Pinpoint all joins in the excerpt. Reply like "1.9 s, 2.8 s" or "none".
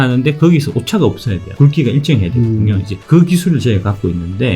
2.9 s